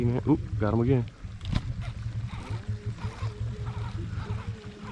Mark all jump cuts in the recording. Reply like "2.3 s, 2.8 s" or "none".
none

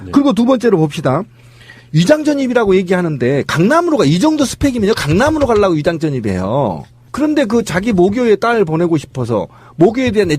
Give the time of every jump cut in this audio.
5.5 s

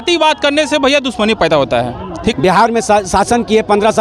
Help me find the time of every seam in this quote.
2.3 s

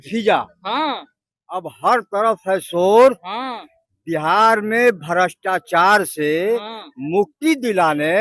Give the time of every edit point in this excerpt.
none

